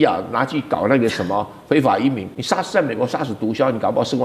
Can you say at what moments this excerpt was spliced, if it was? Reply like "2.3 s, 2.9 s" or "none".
2.3 s